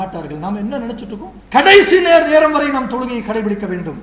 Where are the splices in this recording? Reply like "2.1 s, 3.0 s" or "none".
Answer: 1.3 s